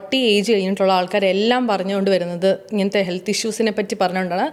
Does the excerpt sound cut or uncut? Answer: uncut